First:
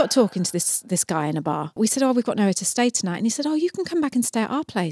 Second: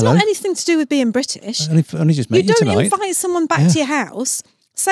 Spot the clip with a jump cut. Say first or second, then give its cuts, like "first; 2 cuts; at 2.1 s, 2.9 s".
first; 1 cut; at 1.8 s